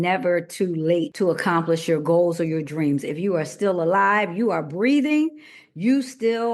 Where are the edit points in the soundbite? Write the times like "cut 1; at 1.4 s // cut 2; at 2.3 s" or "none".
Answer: cut 1; at 1.1 s